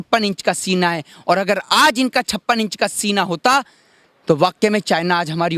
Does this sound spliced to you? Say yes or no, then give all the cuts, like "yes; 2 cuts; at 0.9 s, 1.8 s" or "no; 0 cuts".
no; 0 cuts